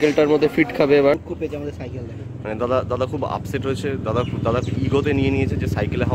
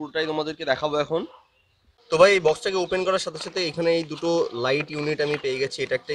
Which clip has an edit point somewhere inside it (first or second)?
first